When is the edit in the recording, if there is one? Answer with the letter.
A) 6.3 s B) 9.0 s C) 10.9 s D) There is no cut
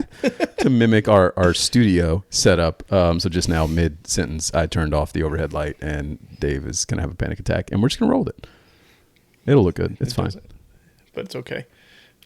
D